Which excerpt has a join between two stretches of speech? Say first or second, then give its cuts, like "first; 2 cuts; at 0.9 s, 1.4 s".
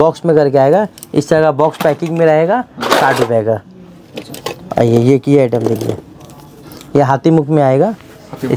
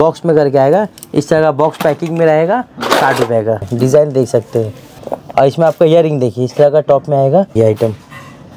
second; 3 cuts; at 3.7 s, 5.0 s, 7.5 s